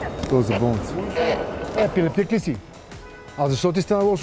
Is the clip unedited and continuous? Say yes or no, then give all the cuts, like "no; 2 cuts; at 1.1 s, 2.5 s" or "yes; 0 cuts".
no; 1 cut; at 1.7 s